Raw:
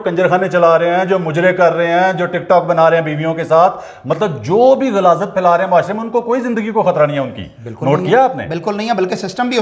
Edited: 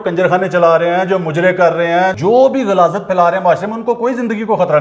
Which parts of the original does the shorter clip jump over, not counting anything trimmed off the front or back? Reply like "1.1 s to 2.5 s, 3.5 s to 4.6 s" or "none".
2.1 s to 4.4 s